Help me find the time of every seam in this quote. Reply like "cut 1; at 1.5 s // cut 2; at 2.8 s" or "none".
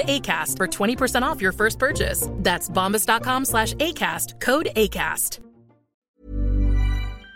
cut 1; at 6.1 s